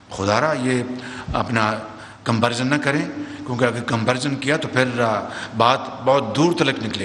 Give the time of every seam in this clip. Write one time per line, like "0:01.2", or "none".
none